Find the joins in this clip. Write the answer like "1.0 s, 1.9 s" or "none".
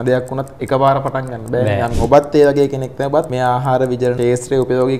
2.0 s, 3.3 s, 4.2 s